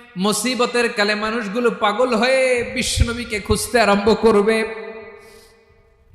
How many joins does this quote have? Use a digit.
0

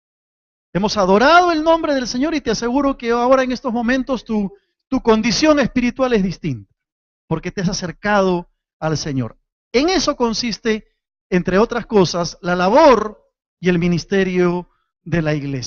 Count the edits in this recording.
0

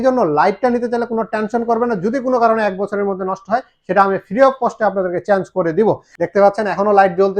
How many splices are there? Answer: 1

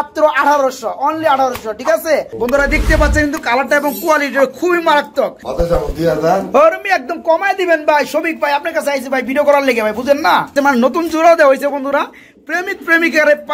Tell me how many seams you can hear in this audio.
3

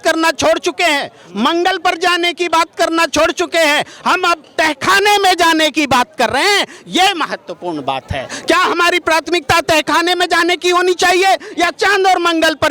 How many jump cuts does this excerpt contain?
0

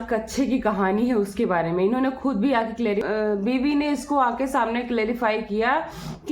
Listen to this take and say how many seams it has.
1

